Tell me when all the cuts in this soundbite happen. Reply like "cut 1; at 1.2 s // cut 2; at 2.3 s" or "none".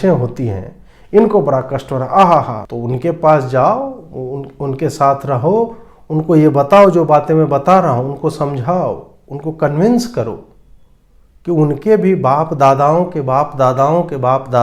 cut 1; at 2.6 s